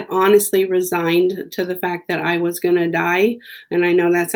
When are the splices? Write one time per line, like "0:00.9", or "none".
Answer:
none